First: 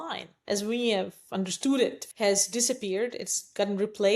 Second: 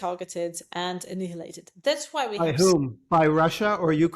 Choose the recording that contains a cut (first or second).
first